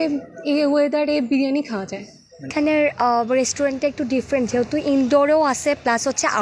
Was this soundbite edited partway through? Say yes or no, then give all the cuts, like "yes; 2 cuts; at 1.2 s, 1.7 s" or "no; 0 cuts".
yes; 1 cut; at 2.5 s